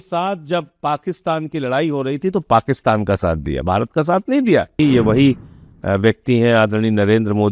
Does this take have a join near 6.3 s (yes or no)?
no